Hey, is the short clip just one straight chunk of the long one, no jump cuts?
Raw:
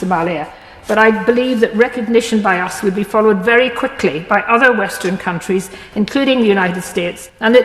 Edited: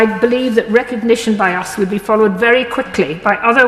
yes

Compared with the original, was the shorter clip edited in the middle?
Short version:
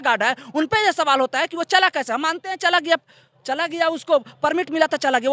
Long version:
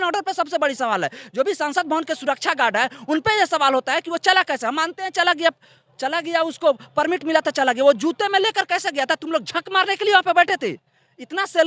no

